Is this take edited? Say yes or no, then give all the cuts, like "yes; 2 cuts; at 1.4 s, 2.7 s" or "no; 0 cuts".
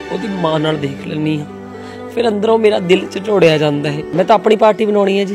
yes; 1 cut; at 4.1 s